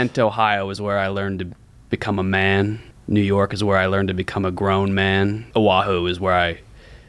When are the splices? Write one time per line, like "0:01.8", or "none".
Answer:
0:02.9
0:05.5